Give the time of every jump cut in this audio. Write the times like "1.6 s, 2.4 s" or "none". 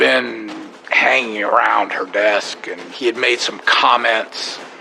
none